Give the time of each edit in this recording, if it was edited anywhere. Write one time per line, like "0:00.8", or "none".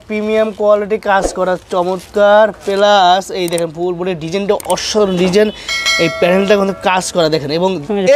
none

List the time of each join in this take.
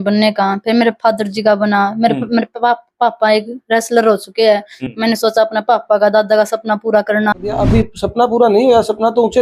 0:04.7
0:07.5

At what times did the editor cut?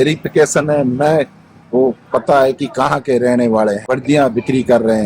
0:03.8

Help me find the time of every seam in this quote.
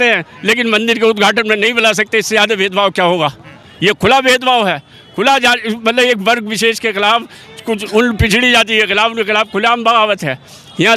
none

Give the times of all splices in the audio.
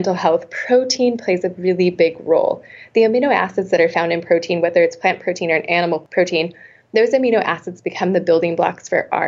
0:06.1

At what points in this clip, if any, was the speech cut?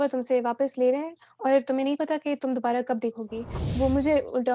0:03.6

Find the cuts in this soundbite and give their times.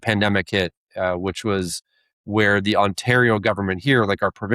none

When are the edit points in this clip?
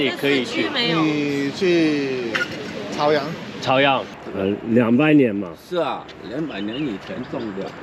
0:04.1

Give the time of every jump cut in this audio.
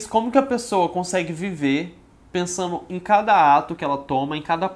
none

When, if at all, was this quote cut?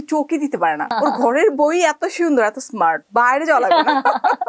0:00.9
0:03.0

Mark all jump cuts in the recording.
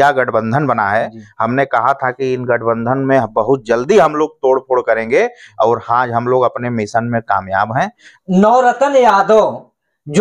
0:08.1

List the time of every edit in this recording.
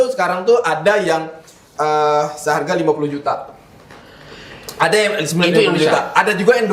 none

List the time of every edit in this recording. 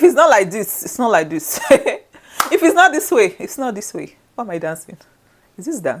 none

